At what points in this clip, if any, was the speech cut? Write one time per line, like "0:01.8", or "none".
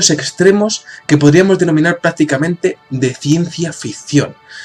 0:03.1